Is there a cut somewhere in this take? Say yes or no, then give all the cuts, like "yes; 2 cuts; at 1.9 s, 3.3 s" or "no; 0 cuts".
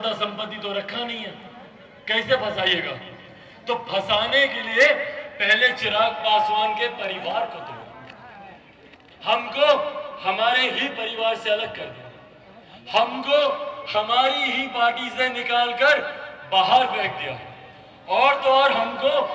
no; 0 cuts